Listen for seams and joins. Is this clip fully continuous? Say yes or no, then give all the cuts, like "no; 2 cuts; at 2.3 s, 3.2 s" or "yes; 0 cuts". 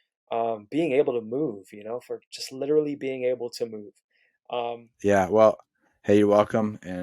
no; 1 cut; at 4.8 s